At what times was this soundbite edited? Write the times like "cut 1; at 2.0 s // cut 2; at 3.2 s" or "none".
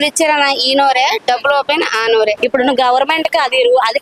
cut 1; at 2.4 s